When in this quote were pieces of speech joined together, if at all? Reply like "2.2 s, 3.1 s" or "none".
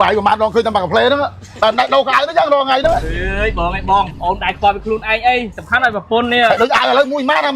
none